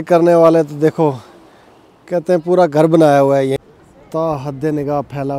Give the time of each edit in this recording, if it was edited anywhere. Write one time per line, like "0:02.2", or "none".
0:03.5